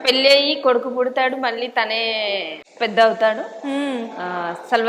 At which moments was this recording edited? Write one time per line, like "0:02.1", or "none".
0:02.6